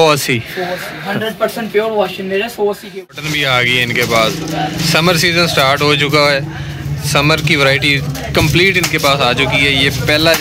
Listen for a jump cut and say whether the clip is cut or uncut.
cut